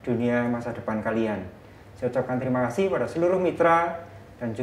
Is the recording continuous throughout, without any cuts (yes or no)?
yes